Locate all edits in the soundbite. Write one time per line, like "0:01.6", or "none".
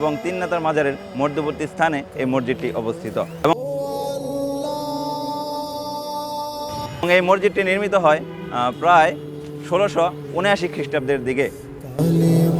0:03.5
0:07.0